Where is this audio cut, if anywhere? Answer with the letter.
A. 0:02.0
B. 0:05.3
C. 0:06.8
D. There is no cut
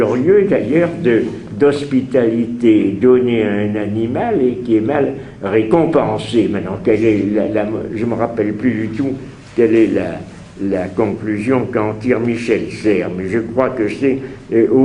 A